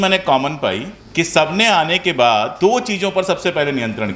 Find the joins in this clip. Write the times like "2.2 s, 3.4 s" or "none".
0.9 s, 2.5 s